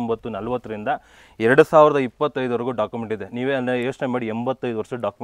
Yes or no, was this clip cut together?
no